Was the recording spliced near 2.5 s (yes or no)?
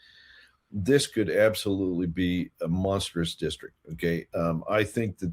no